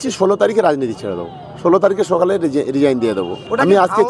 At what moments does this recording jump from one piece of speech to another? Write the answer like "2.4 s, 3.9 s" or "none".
none